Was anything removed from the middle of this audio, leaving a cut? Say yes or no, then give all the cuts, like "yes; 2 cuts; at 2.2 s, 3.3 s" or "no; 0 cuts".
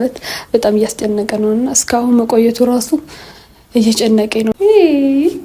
yes; 1 cut; at 4.5 s